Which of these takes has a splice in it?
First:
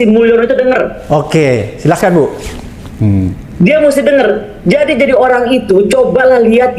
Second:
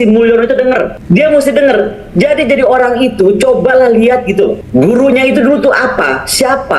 second; 2 cuts; at 1.0 s, 4.6 s

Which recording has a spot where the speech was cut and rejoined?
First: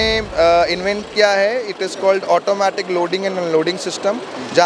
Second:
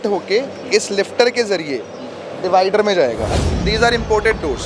second; 1 cut; at 3.5 s

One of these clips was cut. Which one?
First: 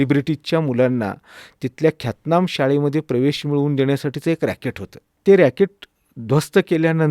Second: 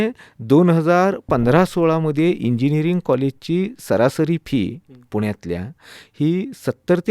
first; 1 cut; at 5.1 s

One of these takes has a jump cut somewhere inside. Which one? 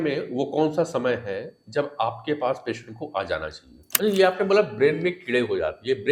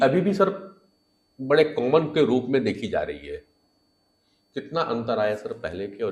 first; 1 cut; at 3.9 s

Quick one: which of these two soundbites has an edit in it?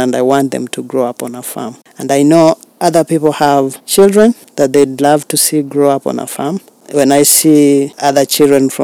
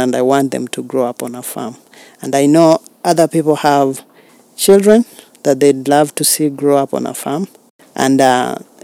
first; 5 cuts; at 1.8 s, 3.8 s, 4.4 s, 6.7 s, 7.9 s

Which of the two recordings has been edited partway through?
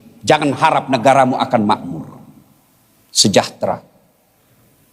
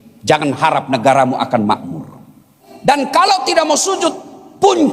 second; 1 cut; at 2.6 s

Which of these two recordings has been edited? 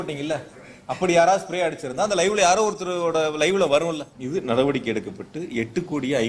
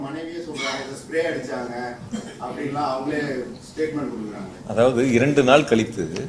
first; 1 cut; at 4.1 s

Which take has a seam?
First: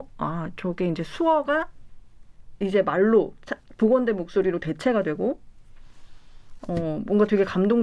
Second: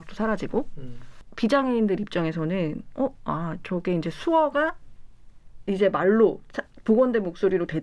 second; 1 cut; at 1.3 s

